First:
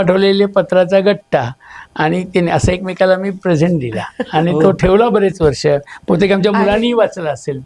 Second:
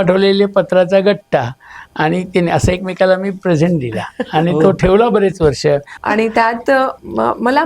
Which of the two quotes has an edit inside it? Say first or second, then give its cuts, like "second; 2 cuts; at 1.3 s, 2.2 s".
second; 1 cut; at 5.9 s